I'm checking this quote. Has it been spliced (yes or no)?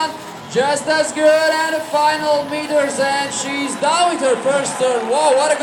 no